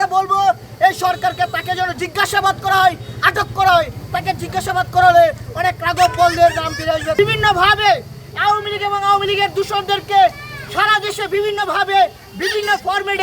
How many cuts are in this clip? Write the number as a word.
one